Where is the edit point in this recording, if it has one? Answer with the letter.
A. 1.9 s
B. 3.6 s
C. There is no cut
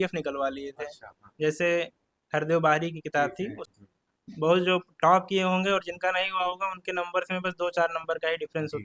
B